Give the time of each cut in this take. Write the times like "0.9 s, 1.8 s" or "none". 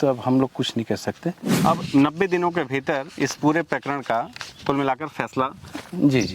1.5 s